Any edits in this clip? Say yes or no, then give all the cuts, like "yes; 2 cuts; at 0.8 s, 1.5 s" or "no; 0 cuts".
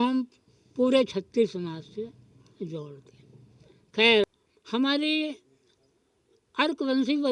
yes; 1 cut; at 4.2 s